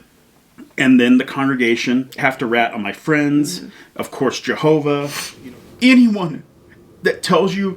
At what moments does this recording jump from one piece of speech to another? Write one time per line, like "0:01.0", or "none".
0:02.2
0:05.2